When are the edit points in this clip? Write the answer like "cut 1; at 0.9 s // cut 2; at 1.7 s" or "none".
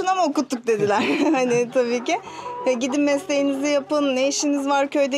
none